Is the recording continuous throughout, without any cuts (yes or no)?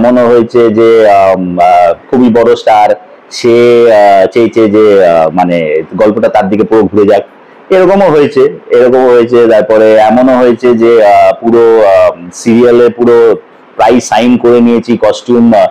yes